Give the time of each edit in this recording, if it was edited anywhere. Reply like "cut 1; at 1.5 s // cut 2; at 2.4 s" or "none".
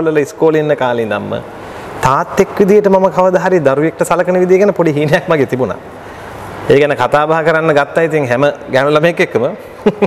none